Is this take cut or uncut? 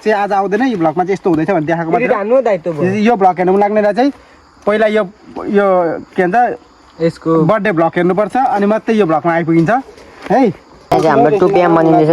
cut